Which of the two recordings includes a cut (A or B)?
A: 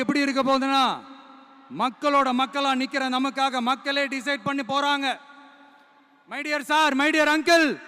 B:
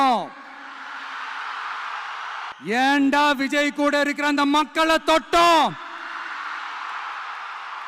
B